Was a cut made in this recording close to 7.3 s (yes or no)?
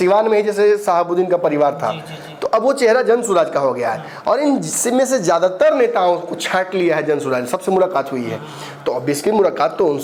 no